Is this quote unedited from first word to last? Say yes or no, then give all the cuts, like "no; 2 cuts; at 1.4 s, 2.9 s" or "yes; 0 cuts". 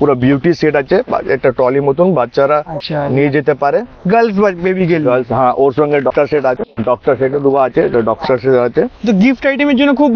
yes; 0 cuts